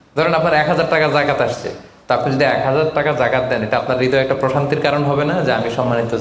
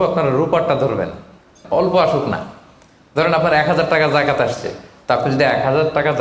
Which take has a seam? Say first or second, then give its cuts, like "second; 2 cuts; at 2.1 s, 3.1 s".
second; 1 cut; at 1.6 s